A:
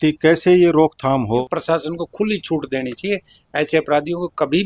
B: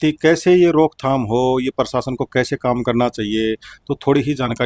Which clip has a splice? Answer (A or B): A